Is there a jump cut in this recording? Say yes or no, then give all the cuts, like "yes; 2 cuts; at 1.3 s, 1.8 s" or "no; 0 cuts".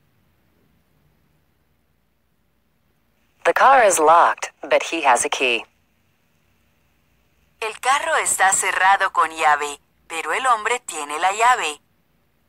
yes; 1 cut; at 3.3 s